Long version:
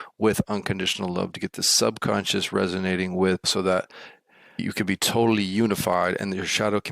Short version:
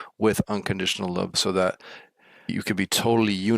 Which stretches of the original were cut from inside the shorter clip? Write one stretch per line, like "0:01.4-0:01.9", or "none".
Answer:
0:01.3-0:03.4